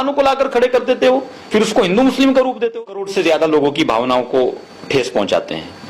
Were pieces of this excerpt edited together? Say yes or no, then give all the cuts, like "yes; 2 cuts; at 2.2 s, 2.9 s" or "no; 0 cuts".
yes; 1 cut; at 3.0 s